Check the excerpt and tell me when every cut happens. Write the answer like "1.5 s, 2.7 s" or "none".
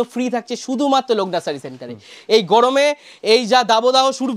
none